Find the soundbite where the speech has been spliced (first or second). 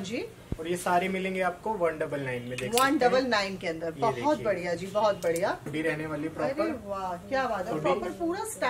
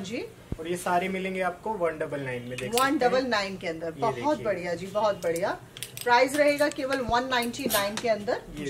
first